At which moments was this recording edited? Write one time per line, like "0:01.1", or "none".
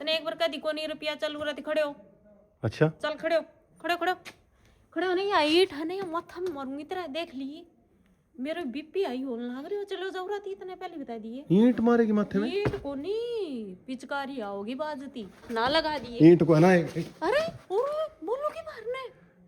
0:15.5